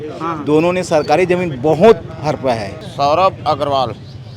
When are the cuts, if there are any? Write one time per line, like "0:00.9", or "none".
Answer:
0:02.8